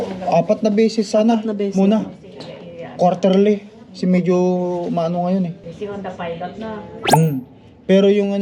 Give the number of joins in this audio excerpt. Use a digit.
1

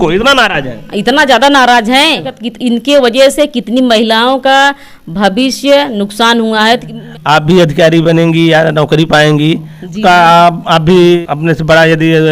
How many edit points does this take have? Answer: 3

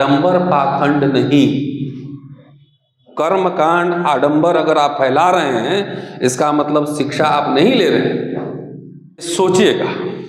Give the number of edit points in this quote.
1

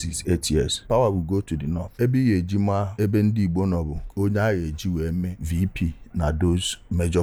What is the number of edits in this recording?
0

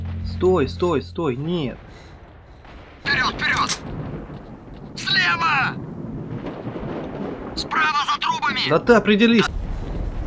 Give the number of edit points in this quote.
2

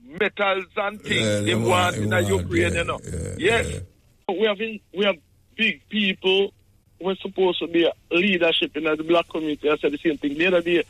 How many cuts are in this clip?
1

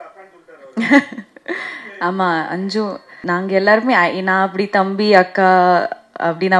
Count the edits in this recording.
1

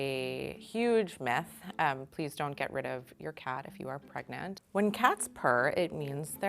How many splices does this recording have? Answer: 1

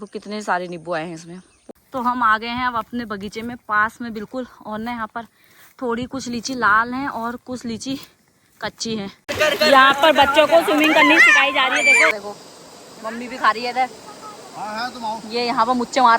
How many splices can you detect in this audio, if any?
3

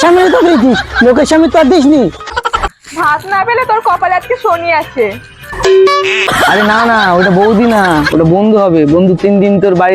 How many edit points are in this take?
2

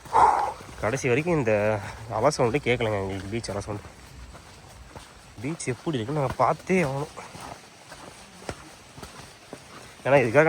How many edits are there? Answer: 1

